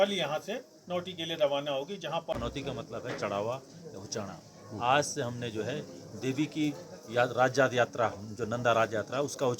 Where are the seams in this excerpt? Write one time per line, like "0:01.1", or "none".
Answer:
0:02.3